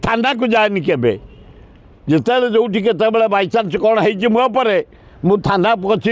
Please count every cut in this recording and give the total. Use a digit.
0